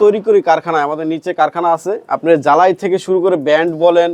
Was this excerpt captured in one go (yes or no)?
yes